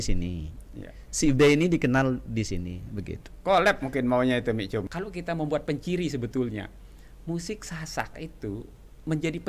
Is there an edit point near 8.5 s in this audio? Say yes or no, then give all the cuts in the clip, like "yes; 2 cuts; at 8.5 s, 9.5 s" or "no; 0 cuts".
no; 1 cut; at 5.0 s